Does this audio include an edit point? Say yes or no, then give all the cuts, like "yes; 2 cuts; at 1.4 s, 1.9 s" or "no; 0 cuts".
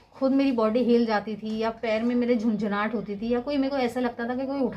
no; 0 cuts